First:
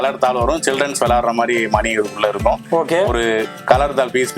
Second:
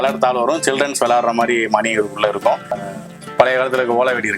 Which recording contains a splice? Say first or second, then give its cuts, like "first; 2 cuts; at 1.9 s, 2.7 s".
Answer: second; 1 cut; at 2.7 s